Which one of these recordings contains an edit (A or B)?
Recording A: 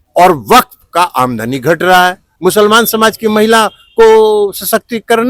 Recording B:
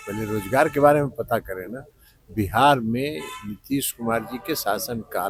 A